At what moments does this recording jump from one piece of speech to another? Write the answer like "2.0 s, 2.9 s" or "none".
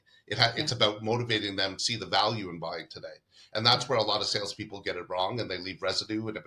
1.8 s